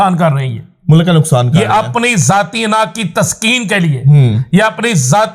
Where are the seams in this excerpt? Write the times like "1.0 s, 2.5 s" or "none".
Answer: none